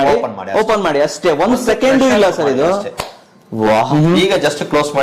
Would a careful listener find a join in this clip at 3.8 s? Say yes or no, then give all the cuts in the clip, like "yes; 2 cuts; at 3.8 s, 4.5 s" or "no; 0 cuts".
yes; 1 cut; at 3.8 s